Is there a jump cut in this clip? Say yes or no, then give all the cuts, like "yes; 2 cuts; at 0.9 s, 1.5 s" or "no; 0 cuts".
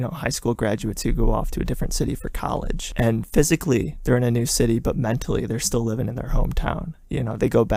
no; 0 cuts